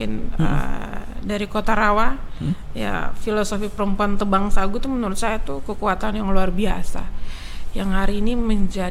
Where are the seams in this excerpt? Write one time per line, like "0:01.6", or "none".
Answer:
none

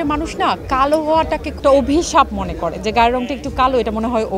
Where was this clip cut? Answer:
none

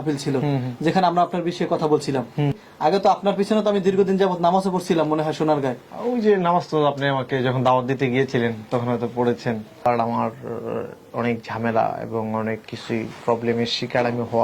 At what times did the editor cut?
0:02.6
0:09.9

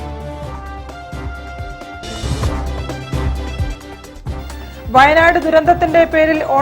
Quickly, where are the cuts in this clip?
none

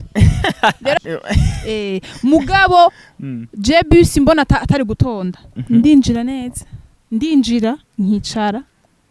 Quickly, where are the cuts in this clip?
0:01.0

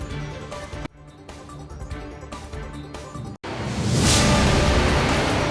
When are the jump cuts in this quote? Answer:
0:03.3

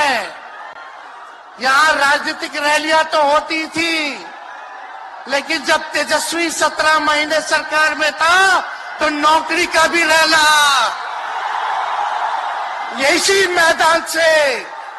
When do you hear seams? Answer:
none

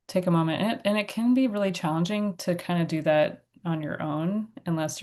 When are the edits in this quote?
none

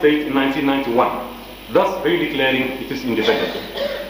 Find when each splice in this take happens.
none

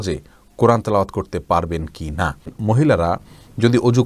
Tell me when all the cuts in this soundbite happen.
0:02.5

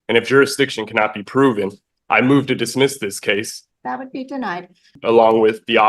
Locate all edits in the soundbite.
0:03.6
0:04.9

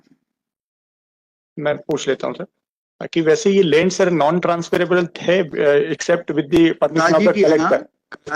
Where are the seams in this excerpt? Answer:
none

